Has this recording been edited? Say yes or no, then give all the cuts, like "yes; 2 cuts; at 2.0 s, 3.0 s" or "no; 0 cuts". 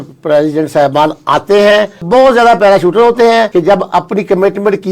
yes; 2 cuts; at 2.0 s, 3.5 s